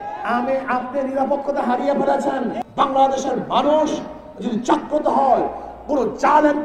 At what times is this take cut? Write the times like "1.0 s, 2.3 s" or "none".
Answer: 2.5 s